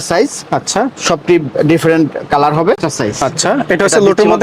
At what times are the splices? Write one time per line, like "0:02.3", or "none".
0:02.8